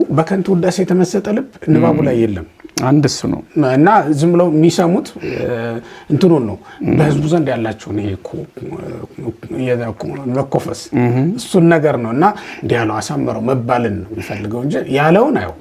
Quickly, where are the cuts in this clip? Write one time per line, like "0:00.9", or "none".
none